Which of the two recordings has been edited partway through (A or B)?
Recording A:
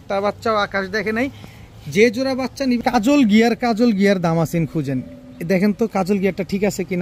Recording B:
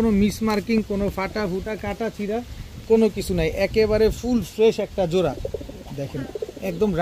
A